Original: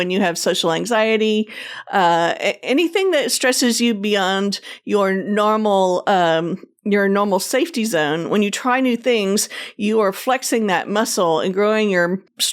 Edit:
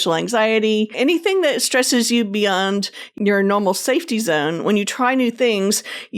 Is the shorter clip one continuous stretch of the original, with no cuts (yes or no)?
no